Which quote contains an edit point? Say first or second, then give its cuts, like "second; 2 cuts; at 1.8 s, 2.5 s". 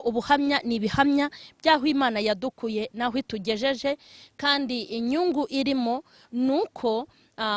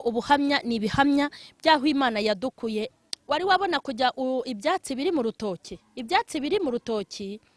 second; 1 cut; at 2.9 s